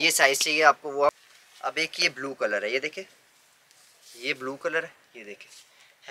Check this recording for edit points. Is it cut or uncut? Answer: cut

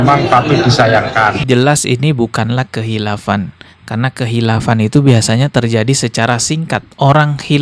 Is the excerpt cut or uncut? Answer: cut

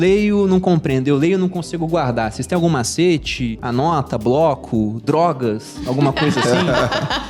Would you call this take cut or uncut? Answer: cut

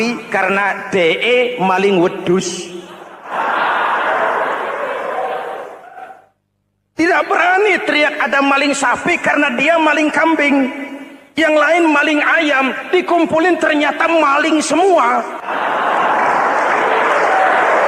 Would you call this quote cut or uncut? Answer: cut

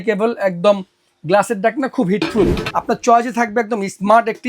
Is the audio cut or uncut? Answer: cut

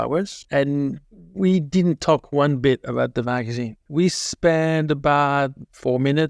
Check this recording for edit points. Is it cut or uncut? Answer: uncut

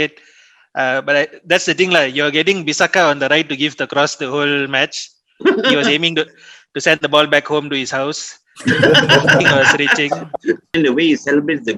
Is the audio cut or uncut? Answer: cut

